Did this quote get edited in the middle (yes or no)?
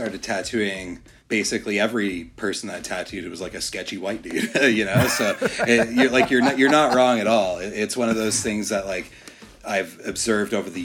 yes